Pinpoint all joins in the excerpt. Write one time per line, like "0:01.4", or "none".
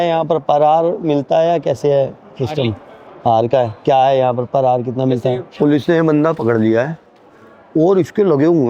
0:05.5